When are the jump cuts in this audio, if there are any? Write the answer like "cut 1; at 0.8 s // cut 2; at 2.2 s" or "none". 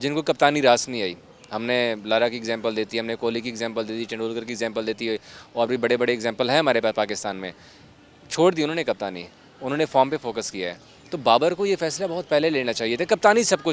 none